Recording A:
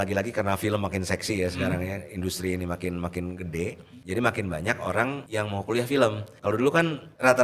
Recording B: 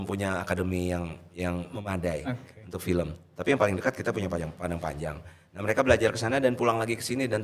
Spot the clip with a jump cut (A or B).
A